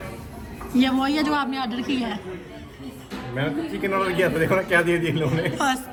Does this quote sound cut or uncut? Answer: uncut